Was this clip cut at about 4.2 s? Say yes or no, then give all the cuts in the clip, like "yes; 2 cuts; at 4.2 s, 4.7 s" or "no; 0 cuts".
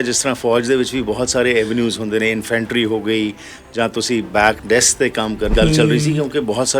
no; 1 cut; at 5.5 s